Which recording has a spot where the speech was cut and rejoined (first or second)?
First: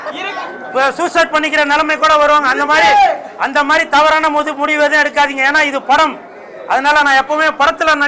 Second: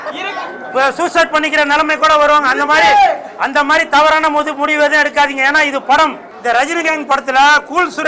second